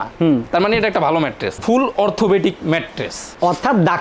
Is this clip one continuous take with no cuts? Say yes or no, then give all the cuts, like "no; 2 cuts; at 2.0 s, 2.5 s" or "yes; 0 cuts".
no; 1 cut; at 1.6 s